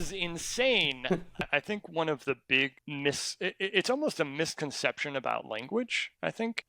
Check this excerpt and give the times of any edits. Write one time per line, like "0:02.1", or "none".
0:01.4